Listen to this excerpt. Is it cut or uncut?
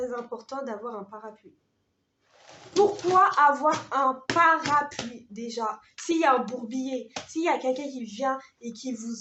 uncut